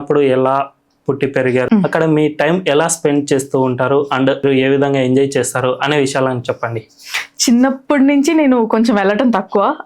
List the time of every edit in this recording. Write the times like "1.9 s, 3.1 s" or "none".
1.7 s, 4.4 s